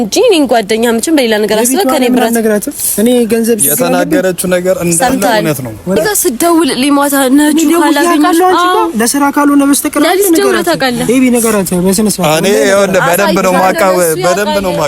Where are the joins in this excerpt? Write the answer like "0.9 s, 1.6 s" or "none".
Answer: 6.0 s